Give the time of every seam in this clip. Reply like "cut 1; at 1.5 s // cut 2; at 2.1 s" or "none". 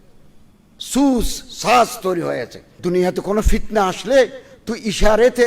cut 1; at 2.7 s